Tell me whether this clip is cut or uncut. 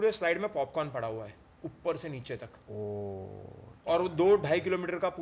uncut